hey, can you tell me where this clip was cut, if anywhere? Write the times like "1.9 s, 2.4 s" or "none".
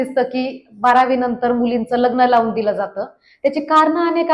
none